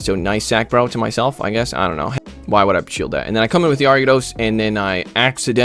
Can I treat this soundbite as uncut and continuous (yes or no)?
no